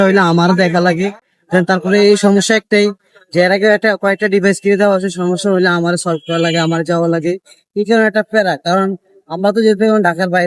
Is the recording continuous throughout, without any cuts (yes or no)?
yes